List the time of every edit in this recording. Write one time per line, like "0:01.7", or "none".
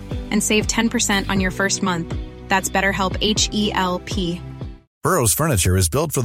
none